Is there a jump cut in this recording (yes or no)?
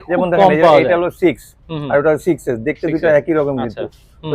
no